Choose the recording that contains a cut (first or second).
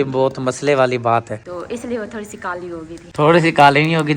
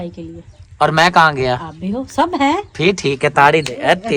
first